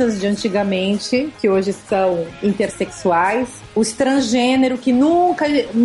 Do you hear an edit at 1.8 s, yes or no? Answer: yes